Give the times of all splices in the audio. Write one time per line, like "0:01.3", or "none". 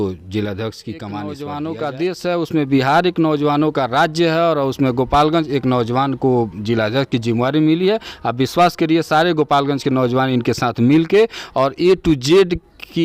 0:01.3